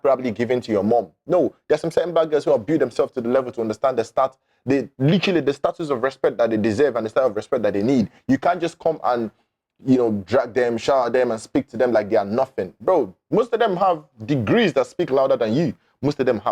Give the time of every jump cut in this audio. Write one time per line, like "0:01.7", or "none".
none